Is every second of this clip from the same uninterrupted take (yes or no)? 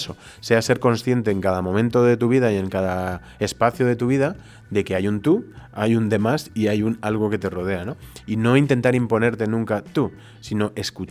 yes